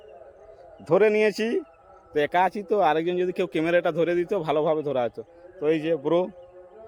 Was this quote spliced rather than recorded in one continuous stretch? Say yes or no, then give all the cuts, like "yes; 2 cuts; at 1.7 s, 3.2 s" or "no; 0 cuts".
no; 0 cuts